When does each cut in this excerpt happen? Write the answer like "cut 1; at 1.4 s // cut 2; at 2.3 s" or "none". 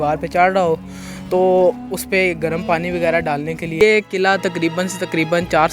cut 1; at 3.8 s